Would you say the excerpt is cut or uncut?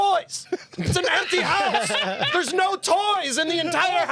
uncut